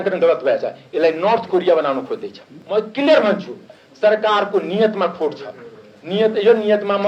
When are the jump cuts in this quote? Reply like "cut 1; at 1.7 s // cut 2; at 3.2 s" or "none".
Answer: cut 1; at 2.5 s

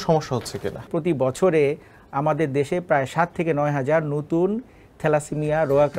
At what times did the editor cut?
cut 1; at 0.9 s

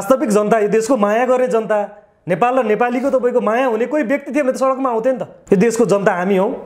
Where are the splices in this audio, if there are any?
cut 1; at 5.3 s

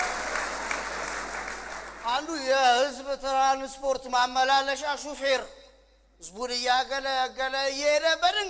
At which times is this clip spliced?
none

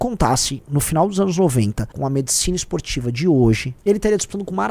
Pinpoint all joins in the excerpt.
cut 1; at 1.9 s // cut 2; at 3.7 s

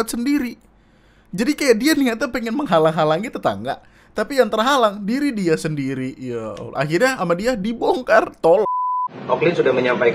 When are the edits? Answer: cut 1; at 8.6 s

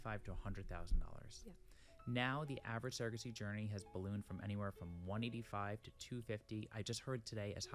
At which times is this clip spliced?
none

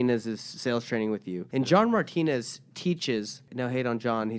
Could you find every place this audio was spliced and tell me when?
cut 1; at 1.4 s // cut 2; at 3.4 s

